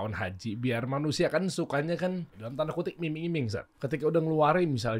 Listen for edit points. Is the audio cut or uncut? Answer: cut